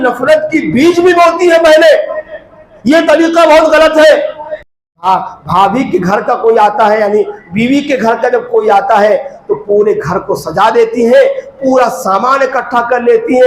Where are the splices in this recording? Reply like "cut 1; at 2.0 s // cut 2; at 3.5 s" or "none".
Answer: cut 1; at 4.6 s